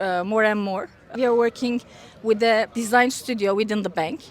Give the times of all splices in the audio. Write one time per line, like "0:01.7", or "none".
0:01.1
0:02.7